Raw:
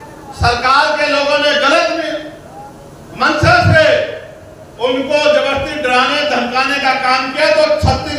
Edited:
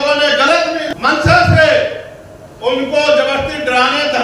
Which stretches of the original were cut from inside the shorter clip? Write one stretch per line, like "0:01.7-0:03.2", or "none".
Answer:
0:02.1-0:03.1